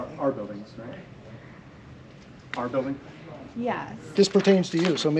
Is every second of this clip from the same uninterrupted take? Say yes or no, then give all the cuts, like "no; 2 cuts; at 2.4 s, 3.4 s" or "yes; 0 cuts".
no; 1 cut; at 3.9 s